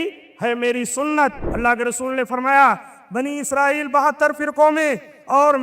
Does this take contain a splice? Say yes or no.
yes